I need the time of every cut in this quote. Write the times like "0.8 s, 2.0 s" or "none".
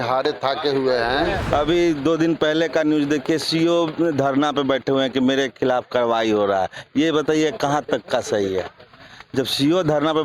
1.4 s